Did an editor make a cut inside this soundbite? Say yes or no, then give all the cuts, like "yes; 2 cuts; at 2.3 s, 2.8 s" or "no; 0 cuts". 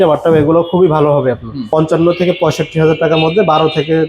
yes; 1 cut; at 1.5 s